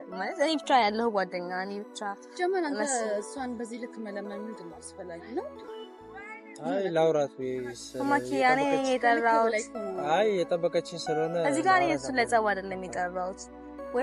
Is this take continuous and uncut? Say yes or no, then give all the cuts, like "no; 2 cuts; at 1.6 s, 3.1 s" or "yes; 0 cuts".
yes; 0 cuts